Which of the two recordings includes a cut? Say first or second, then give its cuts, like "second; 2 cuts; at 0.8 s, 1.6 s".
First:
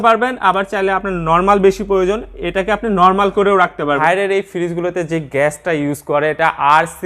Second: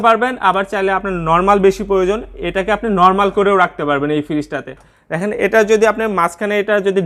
first; 1 cut; at 4.0 s